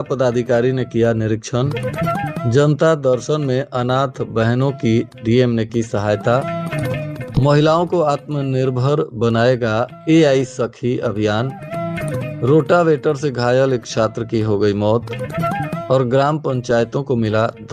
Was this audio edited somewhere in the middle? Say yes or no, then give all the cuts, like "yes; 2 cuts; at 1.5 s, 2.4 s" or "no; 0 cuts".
no; 0 cuts